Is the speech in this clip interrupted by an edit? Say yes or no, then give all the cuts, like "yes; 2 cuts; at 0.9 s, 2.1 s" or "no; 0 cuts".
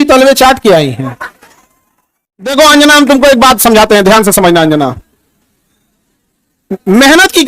yes; 1 cut; at 2.5 s